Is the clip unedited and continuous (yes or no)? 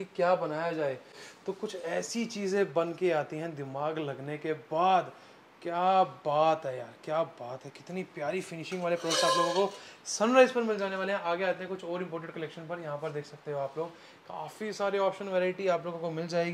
yes